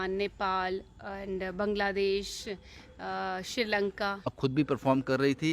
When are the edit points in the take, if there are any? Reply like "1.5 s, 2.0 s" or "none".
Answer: 4.4 s